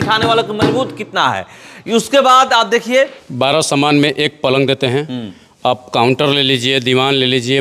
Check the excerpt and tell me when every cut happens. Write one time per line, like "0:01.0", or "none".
0:03.2